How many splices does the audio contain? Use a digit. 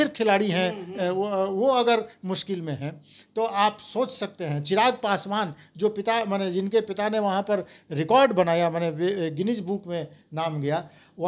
0